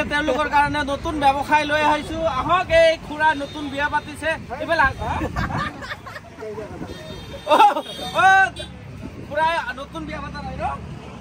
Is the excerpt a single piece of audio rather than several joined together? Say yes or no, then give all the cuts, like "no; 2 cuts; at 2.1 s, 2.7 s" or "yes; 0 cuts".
yes; 0 cuts